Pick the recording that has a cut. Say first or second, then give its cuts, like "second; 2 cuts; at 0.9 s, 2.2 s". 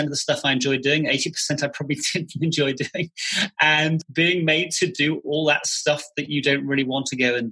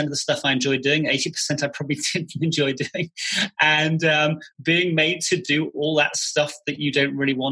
first; 1 cut; at 4.0 s